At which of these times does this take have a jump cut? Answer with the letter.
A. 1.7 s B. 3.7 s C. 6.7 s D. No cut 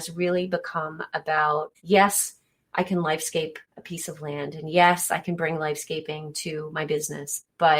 A